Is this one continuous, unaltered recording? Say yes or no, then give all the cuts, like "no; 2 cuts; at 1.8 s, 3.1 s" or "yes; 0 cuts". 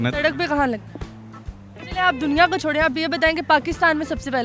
yes; 0 cuts